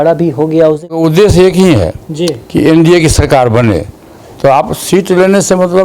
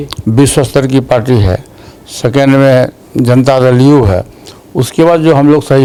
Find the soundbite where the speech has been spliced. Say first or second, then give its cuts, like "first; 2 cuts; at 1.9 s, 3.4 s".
first; 1 cut; at 1.0 s